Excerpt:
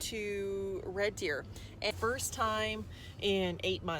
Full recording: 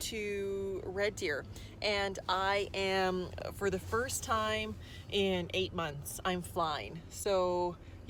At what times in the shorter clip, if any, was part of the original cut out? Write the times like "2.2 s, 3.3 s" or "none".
1.9 s

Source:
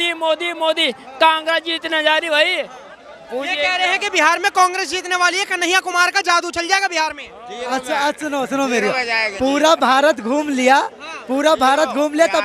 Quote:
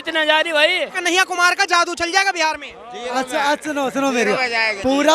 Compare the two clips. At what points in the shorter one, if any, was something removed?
1.0 s

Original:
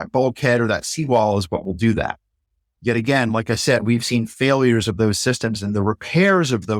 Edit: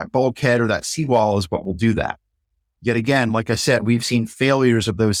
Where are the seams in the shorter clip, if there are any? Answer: none

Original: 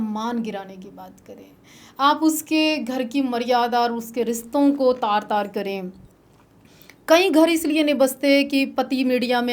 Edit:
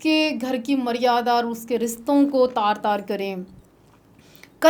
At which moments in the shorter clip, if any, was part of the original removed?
none

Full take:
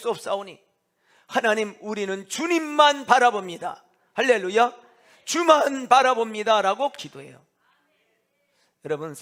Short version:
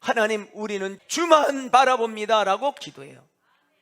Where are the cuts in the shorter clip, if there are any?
1.0 s

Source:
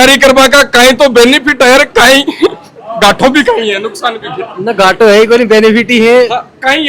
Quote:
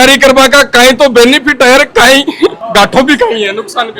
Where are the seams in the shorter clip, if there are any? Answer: 2.6 s

